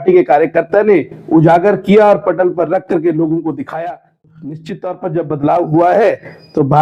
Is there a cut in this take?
yes; 1 cut; at 4.3 s

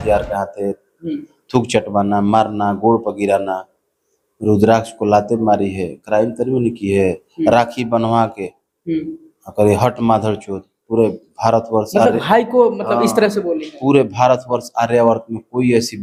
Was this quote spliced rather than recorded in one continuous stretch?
no; 0 cuts

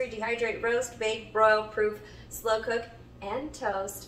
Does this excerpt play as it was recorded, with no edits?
yes; 0 cuts

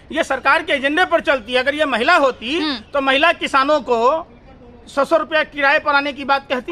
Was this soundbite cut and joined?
no; 0 cuts

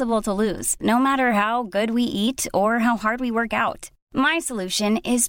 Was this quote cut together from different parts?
no; 0 cuts

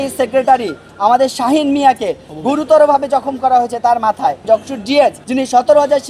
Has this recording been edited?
yes; 2 cuts; at 4.4 s, 5.2 s

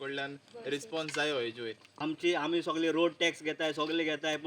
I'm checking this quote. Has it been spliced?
yes; 1 cut; at 1.9 s

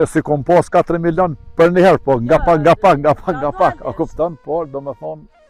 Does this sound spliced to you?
no; 0 cuts

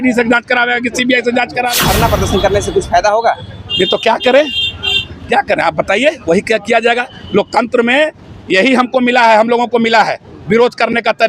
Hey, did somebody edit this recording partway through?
yes; 1 cut; at 1.7 s

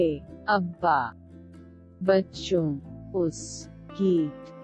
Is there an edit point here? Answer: yes; 1 cut; at 1.2 s

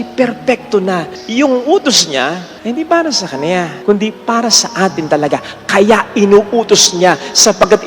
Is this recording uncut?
no; 3 cuts; at 1.2 s, 2.5 s, 3.7 s

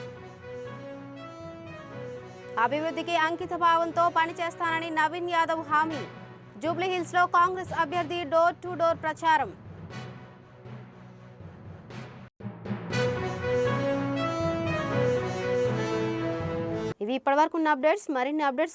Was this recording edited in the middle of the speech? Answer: no; 0 cuts

